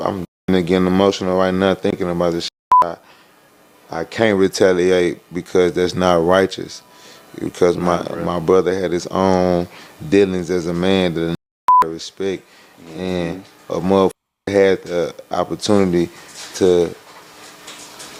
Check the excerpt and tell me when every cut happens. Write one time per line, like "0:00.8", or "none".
none